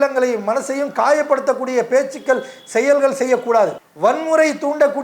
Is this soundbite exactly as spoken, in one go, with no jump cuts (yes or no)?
no